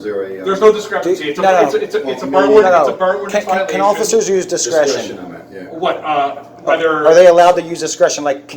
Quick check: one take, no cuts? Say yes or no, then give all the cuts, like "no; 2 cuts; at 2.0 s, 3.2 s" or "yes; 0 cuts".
yes; 0 cuts